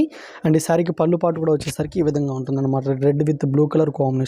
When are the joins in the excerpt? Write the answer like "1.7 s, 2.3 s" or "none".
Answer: none